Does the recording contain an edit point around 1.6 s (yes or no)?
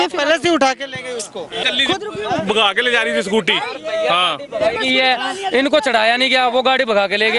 yes